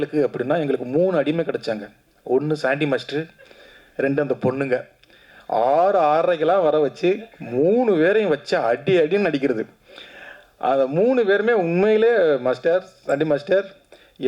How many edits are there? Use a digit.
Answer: 0